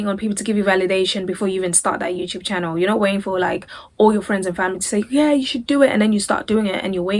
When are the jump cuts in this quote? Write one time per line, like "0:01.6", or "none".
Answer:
none